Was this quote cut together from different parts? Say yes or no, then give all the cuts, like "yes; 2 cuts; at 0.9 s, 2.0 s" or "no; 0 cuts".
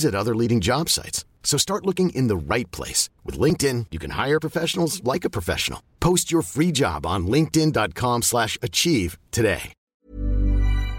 yes; 1 cut; at 9.9 s